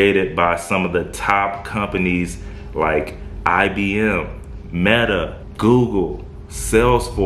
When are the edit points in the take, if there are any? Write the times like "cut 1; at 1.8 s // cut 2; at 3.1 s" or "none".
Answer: none

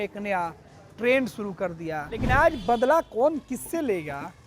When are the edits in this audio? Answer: cut 1; at 2.1 s

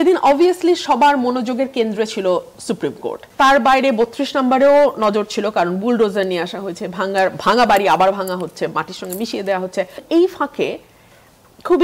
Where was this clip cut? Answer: cut 1; at 3.3 s // cut 2; at 10.0 s

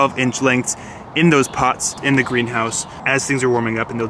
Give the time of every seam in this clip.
none

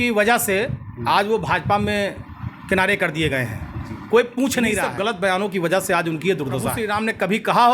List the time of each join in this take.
cut 1; at 4.7 s // cut 2; at 6.8 s

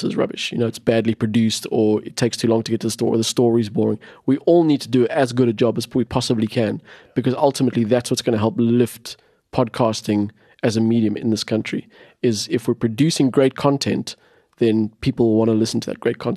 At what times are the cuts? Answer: none

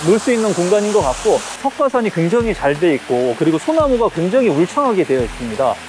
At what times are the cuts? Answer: cut 1; at 1.6 s

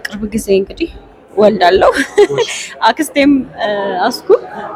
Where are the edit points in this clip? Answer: none

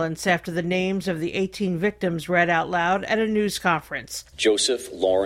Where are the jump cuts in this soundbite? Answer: none

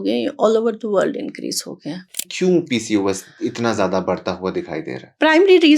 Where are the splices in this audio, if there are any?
cut 1; at 2.1 s

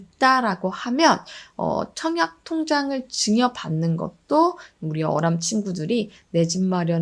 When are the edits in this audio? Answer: none

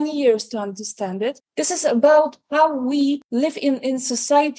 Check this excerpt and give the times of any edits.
cut 1; at 1.4 s // cut 2; at 3.2 s

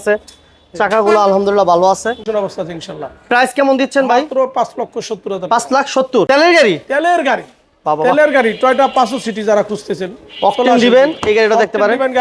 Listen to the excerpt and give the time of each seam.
cut 1; at 2.3 s // cut 2; at 6.3 s

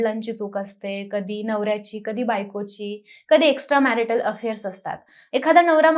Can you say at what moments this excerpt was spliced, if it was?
none

